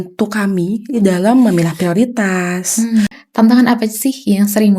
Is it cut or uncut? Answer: cut